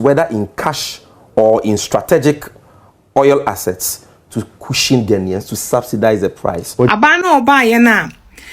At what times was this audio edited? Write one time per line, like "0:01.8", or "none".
0:06.9